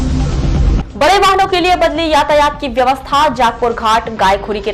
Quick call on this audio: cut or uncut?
uncut